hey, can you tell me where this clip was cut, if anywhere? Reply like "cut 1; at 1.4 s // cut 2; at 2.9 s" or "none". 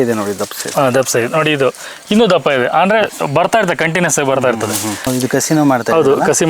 cut 1; at 5.1 s